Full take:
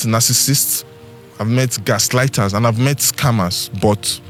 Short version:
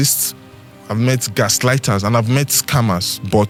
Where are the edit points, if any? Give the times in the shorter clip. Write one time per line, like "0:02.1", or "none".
none

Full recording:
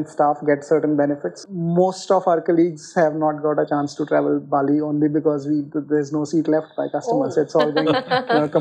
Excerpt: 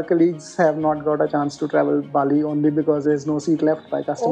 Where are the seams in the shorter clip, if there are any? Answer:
0:03.0

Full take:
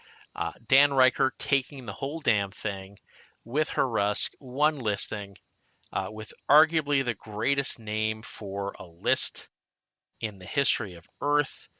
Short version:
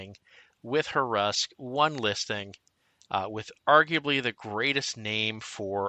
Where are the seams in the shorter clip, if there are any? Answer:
none

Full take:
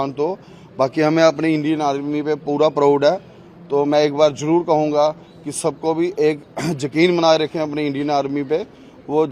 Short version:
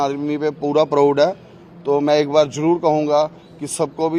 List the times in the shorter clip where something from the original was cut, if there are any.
none

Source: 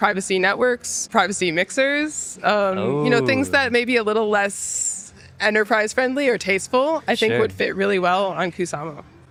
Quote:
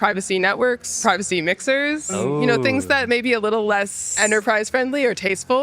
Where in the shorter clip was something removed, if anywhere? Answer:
0:00.9
0:02.1
0:04.0

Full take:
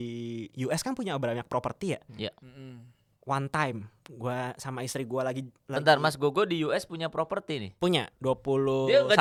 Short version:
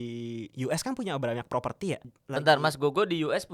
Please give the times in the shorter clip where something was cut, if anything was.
0:02.1

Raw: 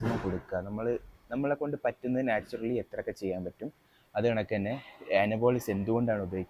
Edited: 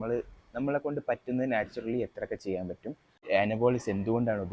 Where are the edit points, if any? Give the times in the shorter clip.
0:03.1

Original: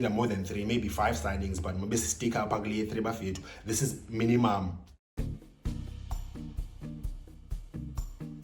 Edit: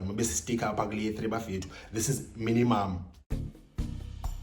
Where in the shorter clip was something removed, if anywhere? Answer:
0:03.1

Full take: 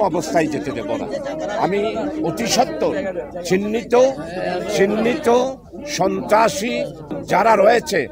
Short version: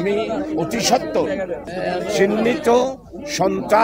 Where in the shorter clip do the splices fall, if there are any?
0:01.7

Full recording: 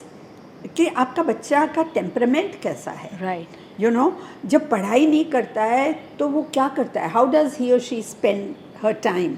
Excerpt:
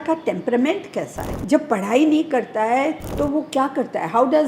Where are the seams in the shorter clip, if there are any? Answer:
0:01.3

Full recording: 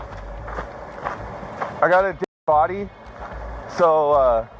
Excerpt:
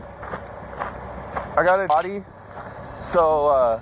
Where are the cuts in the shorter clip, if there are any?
0:01.9

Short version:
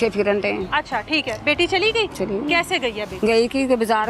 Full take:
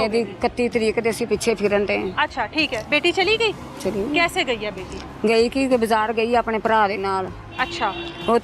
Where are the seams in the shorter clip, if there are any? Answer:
0:02.1
0:03.1

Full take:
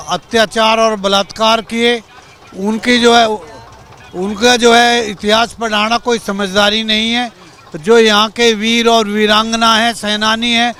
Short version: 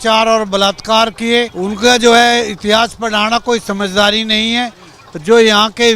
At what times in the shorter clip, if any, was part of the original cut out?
0:01.6

